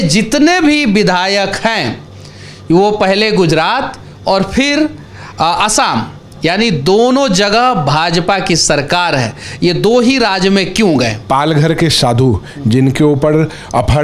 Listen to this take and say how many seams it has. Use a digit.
1